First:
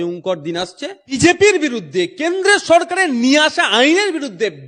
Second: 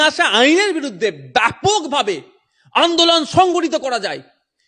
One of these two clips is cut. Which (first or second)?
first